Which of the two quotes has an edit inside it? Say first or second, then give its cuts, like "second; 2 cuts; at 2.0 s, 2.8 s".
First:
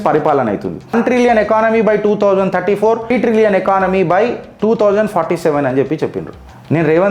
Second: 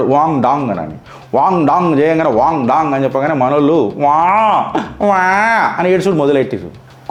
first; 2 cuts; at 0.9 s, 3.1 s